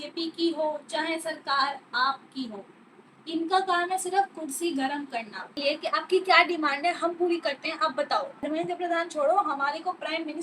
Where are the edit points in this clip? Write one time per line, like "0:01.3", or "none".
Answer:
0:05.5
0:08.4